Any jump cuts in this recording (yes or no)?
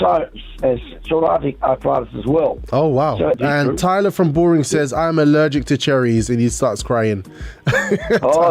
yes